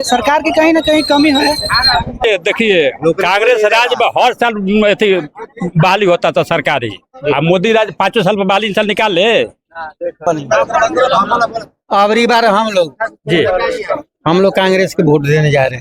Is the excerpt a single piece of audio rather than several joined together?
no; 2 cuts; at 2.2 s, 10.2 s

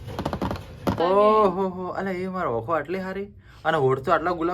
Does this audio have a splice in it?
yes; 1 cut; at 1.0 s

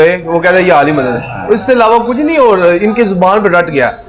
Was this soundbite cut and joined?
no; 0 cuts

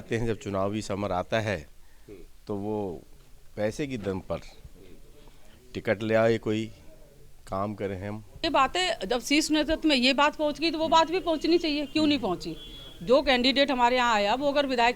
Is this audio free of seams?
no; 1 cut; at 8.4 s

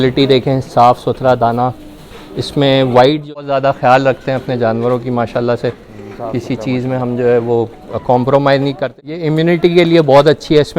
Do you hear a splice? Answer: yes; 2 cuts; at 3.5 s, 8.8 s

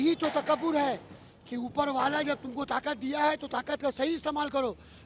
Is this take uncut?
yes; 0 cuts

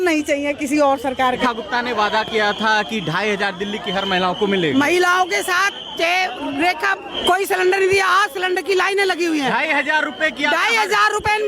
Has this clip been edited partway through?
yes; 2 cuts; at 1.4 s, 7.1 s

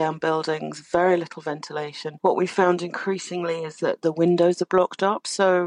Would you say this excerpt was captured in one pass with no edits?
yes; 0 cuts

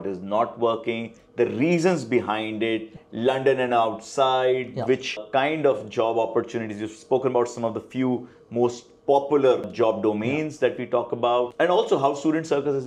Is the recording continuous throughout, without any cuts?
yes; 0 cuts

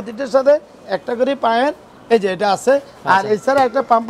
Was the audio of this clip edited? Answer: no; 0 cuts

